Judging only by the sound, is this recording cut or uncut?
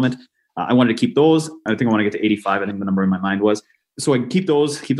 uncut